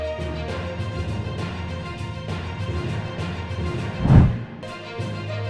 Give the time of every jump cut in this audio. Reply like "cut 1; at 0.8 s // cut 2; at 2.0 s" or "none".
none

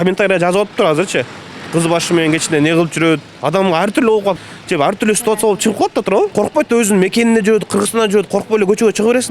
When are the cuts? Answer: cut 1; at 3.3 s // cut 2; at 4.4 s // cut 3; at 6.3 s

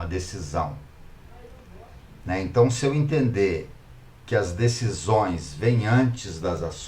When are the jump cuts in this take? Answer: none

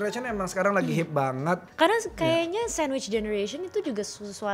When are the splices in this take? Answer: cut 1; at 1.7 s

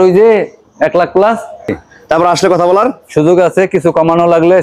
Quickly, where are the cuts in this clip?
cut 1; at 1.7 s

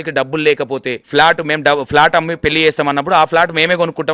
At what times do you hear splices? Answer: cut 1; at 1.0 s

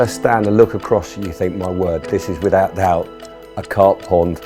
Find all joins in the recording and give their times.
none

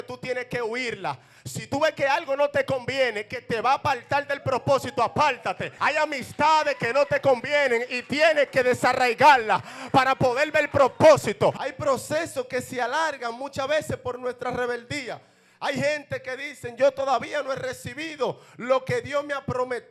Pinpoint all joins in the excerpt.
cut 1; at 5.7 s // cut 2; at 11.7 s

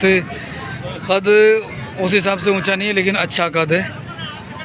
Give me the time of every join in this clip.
none

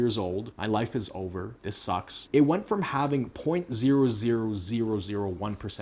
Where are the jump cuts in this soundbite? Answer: none

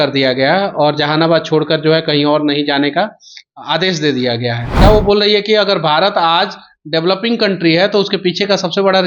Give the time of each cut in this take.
cut 1; at 4.7 s

